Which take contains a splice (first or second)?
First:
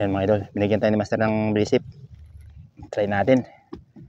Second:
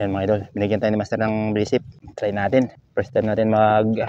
second